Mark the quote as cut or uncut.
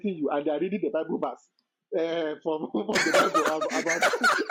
uncut